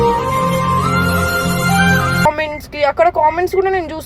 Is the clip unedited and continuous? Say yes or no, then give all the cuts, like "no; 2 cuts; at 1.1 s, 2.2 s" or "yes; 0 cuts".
no; 1 cut; at 2.3 s